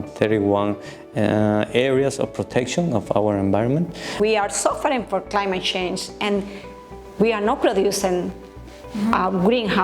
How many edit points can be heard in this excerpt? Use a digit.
1